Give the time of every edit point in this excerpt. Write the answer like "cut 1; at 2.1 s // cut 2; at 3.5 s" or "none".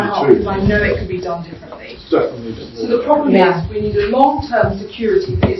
cut 1; at 4.7 s